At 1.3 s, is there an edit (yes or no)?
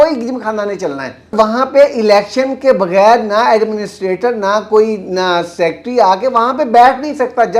yes